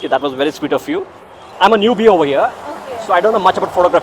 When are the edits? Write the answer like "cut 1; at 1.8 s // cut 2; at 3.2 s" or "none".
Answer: cut 1; at 1.5 s